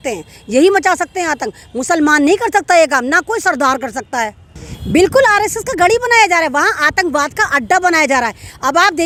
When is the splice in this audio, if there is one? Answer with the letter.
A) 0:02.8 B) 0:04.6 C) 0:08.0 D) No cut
D